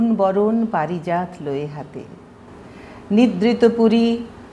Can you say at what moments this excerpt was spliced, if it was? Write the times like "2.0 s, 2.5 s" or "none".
none